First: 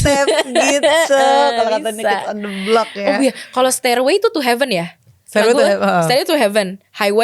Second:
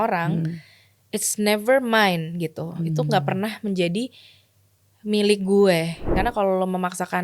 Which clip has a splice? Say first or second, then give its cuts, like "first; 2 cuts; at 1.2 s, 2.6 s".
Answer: second; 1 cut; at 6.1 s